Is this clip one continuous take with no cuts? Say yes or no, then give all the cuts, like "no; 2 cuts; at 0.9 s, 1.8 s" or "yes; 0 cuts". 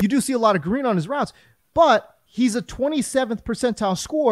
yes; 0 cuts